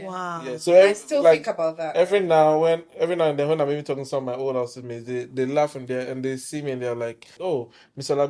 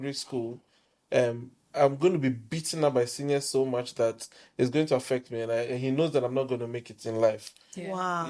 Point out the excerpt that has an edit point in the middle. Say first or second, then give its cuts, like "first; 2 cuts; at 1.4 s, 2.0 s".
first; 1 cut; at 7.4 s